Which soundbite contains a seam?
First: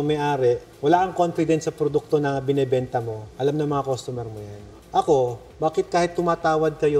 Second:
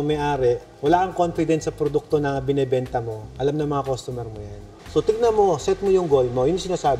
second; 1 cut; at 4.8 s

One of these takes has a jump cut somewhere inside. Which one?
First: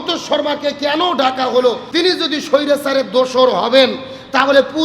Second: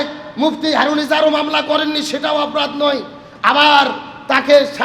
first; 1 cut; at 1.8 s

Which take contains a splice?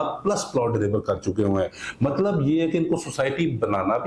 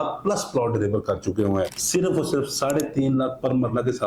second; 1 cut; at 1.8 s

